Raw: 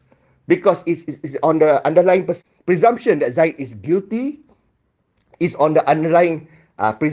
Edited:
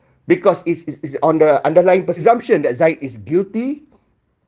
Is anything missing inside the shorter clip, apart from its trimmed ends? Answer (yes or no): yes